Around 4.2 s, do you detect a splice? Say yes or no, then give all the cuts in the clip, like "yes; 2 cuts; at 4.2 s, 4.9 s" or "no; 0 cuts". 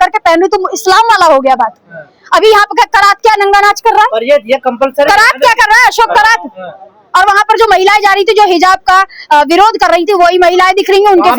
no; 0 cuts